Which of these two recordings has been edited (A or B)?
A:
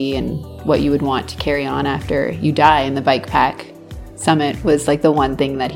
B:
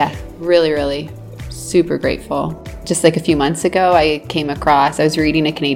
B